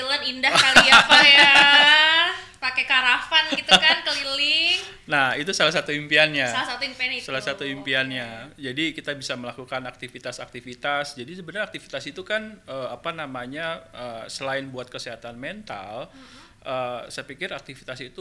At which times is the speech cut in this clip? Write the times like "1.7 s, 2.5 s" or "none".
none